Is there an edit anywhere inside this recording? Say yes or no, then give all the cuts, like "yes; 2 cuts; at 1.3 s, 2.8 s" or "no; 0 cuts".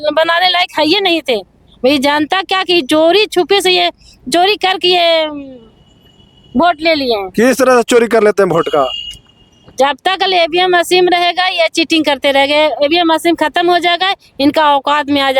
no; 0 cuts